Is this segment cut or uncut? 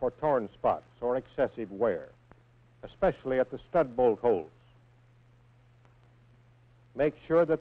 cut